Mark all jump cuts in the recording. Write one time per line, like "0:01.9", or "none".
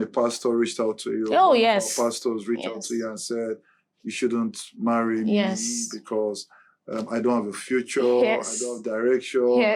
none